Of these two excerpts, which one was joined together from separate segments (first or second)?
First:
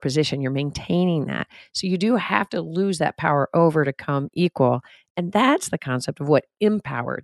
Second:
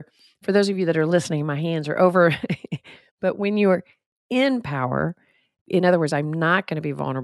second